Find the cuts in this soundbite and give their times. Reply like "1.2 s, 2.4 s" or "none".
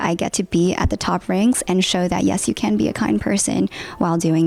none

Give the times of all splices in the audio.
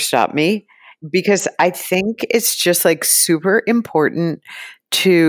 1.1 s

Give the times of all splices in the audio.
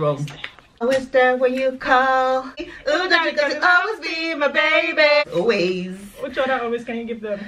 0.8 s, 2.6 s, 5.2 s

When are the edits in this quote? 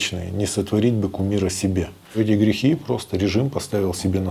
2.2 s

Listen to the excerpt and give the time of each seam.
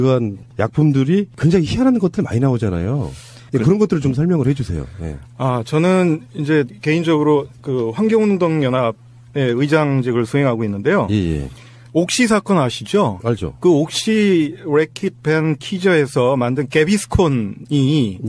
16.4 s

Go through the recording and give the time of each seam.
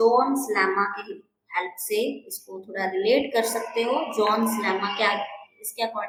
none

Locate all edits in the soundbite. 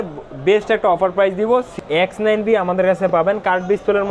1.7 s

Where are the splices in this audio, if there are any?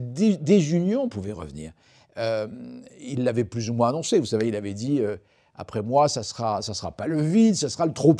none

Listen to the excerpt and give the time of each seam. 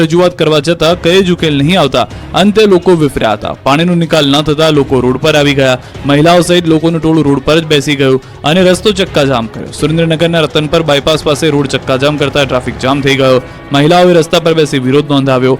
13.0 s

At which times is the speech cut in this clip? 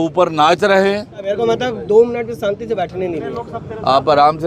1.3 s

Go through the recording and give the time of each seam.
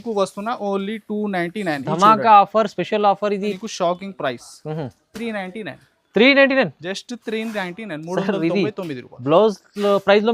3.6 s

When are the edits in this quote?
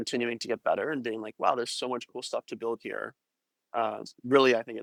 none

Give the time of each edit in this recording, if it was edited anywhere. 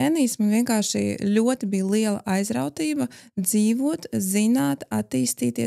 none

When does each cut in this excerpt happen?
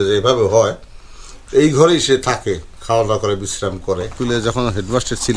4.1 s

